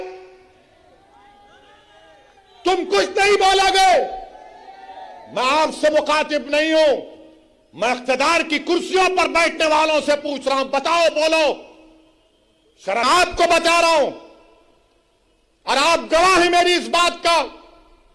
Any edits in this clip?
yes; 1 cut; at 13.0 s

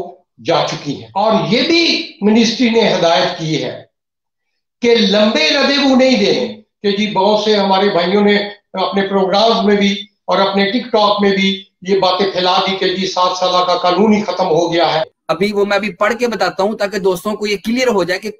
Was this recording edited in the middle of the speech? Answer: yes; 3 cuts; at 1.0 s, 6.6 s, 15.1 s

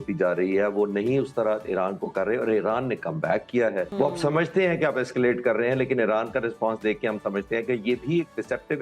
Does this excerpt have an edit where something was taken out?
yes; 1 cut; at 3.9 s

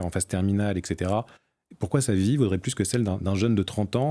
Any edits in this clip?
no; 0 cuts

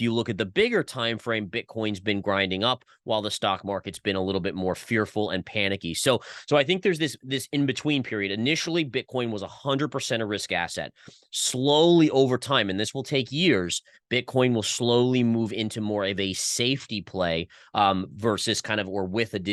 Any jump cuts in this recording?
no; 0 cuts

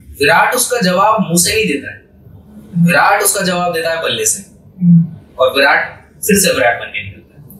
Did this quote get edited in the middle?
no; 0 cuts

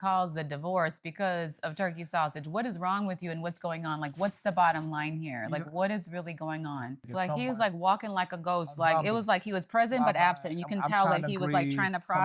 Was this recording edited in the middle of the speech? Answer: yes; 1 cut; at 7.0 s

